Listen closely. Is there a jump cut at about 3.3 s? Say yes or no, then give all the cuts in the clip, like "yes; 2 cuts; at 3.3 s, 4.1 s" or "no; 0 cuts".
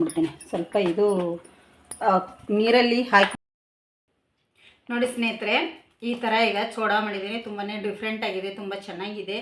yes; 1 cut; at 3.3 s